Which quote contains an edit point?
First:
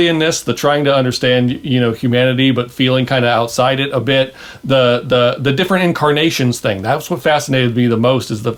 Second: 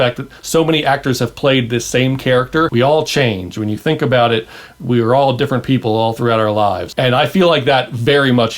second; 2 cuts; at 2.7 s, 6.9 s

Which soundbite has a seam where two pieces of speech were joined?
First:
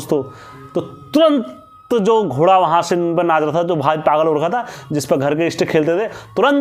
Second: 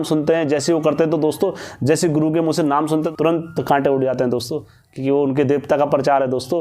second; 1 cut; at 3.1 s

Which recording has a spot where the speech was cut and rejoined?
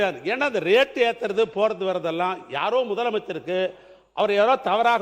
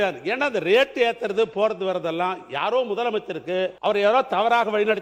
second; 1 cut; at 3.8 s

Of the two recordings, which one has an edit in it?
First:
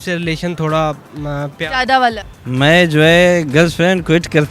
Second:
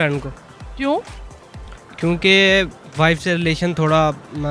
first; 1 cut; at 2.3 s

